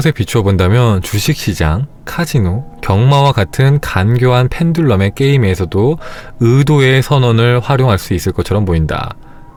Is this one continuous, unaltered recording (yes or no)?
yes